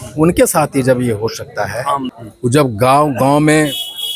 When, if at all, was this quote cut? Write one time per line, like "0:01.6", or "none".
0:02.1